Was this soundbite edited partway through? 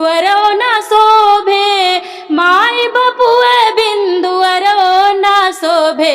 no; 0 cuts

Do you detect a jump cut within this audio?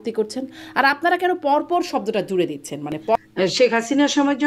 yes; 1 cut; at 3.2 s

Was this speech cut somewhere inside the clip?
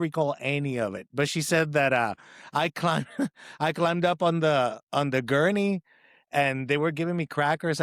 no; 0 cuts

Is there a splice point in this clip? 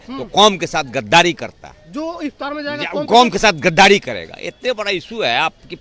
no; 0 cuts

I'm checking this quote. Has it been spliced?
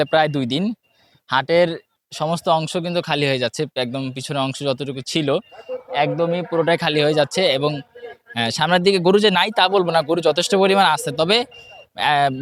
no; 0 cuts

